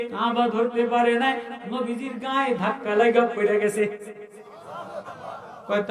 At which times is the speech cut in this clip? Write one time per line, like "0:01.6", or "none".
0:01.6
0:05.1